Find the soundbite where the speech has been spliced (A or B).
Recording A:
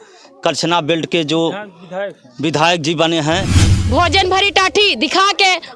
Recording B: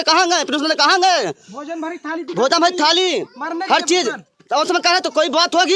A